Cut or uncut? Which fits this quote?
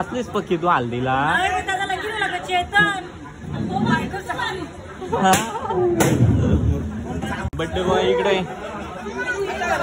uncut